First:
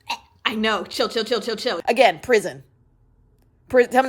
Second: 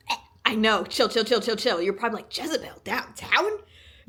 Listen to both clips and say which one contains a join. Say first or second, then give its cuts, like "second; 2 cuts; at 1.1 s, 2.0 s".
first; 1 cut; at 1.8 s